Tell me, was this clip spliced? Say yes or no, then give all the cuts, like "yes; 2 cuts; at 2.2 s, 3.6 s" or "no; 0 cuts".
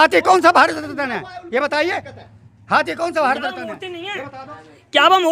no; 0 cuts